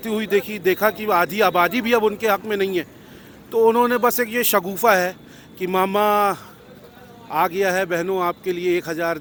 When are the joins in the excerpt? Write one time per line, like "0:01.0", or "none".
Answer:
none